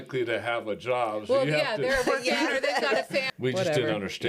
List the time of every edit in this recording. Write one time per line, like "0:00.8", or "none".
0:03.3